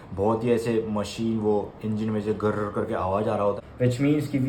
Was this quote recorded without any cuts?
no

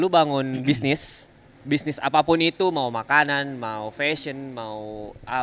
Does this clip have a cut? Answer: no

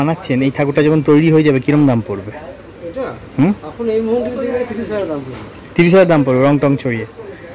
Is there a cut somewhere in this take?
no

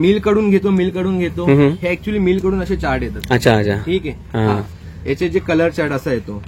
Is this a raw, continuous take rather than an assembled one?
yes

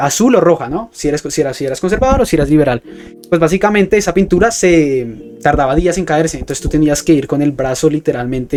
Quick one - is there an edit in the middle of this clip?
no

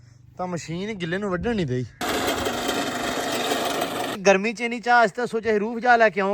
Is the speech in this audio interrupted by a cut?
yes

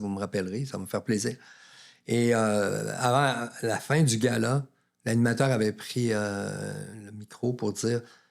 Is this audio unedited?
yes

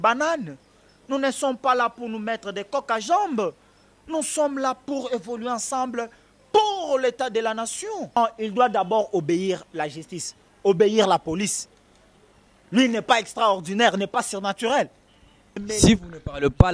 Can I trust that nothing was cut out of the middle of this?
no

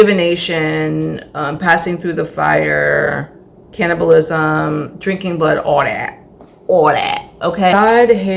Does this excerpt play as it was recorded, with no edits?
yes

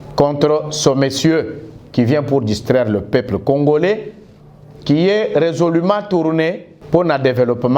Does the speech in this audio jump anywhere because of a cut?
yes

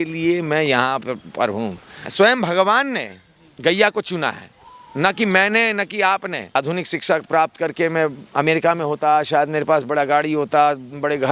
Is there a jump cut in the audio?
yes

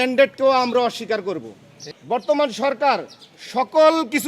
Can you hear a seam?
yes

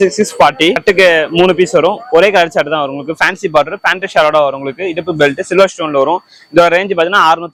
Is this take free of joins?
yes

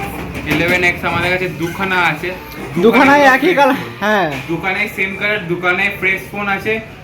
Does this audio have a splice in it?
no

